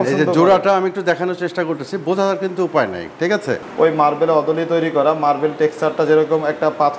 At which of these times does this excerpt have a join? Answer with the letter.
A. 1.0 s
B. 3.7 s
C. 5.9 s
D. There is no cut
B